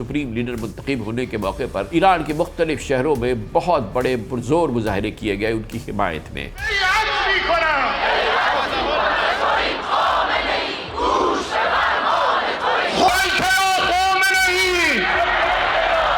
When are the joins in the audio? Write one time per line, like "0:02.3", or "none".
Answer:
0:01.9
0:06.6
0:12.9